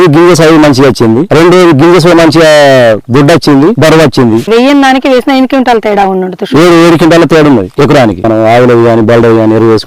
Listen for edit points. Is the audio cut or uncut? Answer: cut